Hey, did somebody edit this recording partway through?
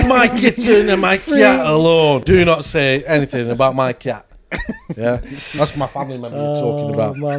yes; 1 cut; at 2.2 s

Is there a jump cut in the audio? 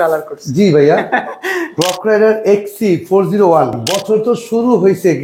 yes; 2 cuts; at 1.8 s, 3.9 s

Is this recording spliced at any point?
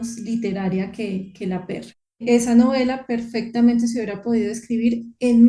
yes; 1 cut; at 2.2 s

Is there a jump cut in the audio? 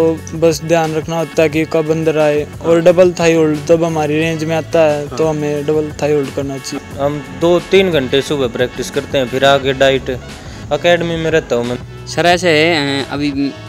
yes; 2 cuts; at 6.8 s, 11.7 s

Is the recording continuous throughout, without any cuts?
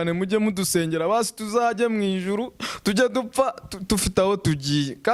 yes; 0 cuts

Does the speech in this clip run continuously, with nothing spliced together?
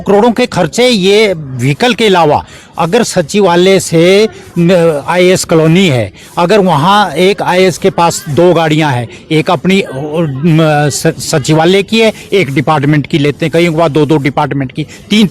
yes; 0 cuts

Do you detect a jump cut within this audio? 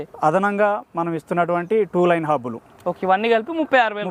no; 0 cuts

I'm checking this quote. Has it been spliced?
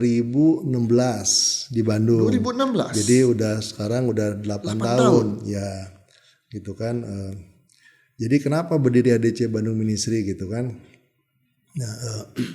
no; 0 cuts

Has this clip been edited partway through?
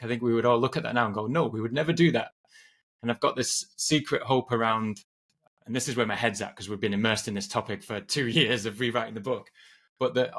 no; 0 cuts

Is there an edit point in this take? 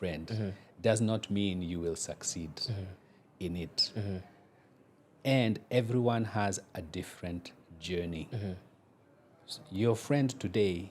no; 0 cuts

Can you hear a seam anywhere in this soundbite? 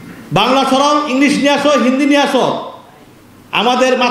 no; 0 cuts

